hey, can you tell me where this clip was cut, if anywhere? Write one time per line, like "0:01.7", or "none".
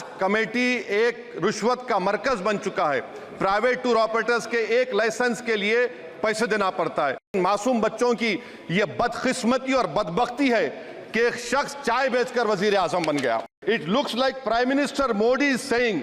0:07.3
0:13.5